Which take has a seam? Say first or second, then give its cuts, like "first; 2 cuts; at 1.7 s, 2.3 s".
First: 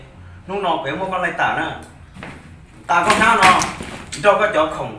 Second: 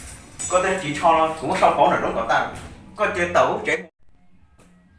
second; 1 cut; at 3.8 s